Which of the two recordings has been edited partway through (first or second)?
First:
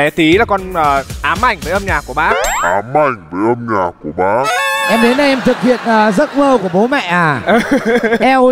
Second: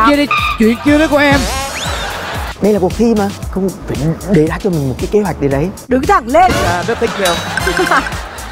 second